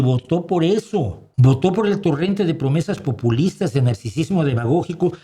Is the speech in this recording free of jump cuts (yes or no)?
no